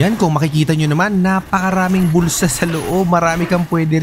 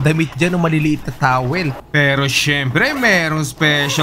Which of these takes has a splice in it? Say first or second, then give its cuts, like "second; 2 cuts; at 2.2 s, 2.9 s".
second; 1 cut; at 1.8 s